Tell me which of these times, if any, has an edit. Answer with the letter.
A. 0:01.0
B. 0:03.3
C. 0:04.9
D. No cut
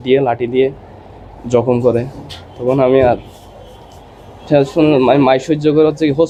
D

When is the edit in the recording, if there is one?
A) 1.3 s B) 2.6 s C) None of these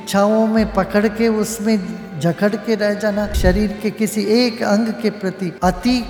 C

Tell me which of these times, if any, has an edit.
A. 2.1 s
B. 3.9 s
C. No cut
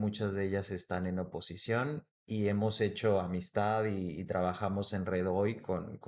C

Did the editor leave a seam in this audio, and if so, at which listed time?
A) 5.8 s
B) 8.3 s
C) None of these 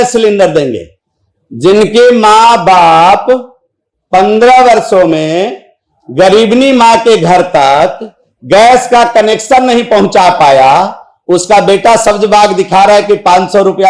C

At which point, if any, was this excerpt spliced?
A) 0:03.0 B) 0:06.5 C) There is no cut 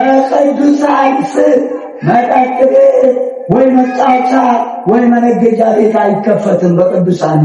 C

